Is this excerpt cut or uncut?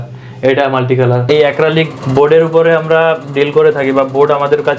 cut